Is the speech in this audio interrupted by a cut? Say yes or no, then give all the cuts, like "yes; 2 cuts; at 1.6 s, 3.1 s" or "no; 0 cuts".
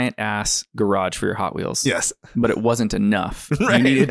no; 0 cuts